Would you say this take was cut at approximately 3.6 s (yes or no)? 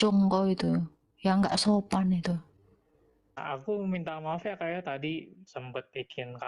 yes